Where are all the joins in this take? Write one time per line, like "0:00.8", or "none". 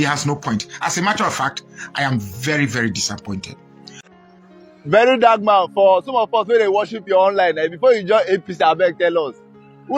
0:04.0